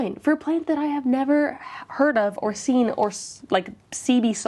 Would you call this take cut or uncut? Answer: uncut